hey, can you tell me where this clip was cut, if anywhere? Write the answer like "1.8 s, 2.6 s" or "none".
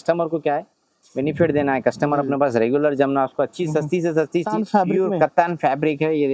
4.5 s